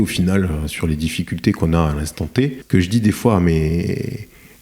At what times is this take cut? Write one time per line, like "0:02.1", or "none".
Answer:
0:02.6

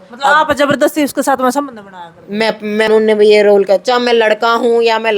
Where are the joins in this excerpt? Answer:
0:02.9

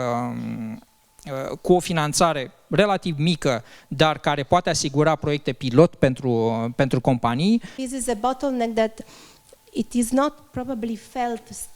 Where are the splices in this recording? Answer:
0:07.8

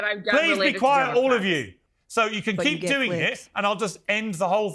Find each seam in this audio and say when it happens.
0:01.8

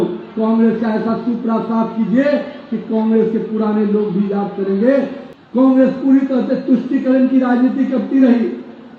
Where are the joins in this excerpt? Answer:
0:05.2

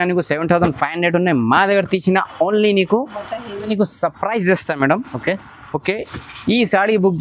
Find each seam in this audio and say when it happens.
0:03.7

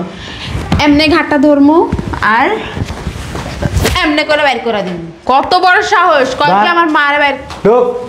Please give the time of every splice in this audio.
none

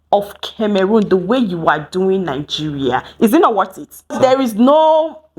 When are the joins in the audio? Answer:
0:04.1

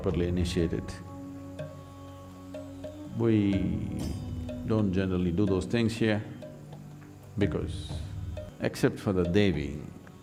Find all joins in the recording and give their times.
none

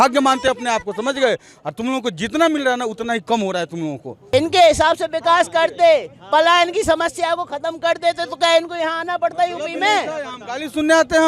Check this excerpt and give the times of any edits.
none

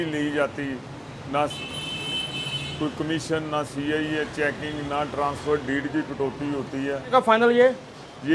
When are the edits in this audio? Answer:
0:07.1

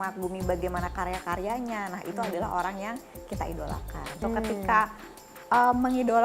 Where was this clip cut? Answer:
0:04.2

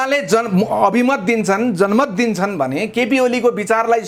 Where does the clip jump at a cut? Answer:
none

